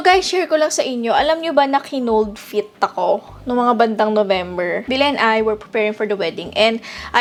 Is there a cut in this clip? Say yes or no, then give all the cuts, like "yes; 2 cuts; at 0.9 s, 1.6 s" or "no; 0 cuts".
no; 0 cuts